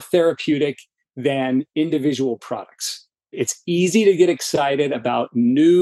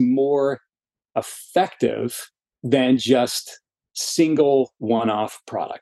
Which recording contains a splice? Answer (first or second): first